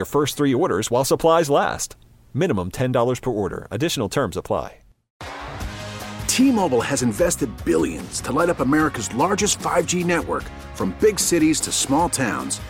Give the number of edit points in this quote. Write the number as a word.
one